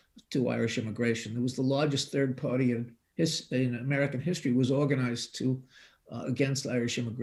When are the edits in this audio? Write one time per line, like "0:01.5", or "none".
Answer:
none